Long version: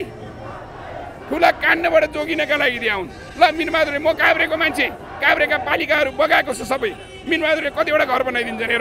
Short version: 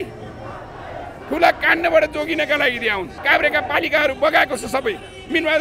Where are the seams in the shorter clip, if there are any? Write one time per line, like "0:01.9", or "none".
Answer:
0:03.1